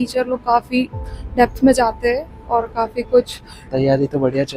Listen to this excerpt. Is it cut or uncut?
cut